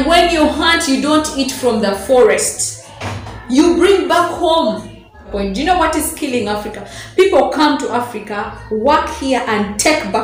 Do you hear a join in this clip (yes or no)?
yes